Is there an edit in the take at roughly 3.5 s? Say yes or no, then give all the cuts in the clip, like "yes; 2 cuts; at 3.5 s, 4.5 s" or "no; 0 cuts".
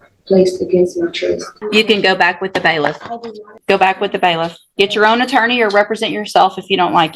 yes; 2 cuts; at 1.5 s, 3.5 s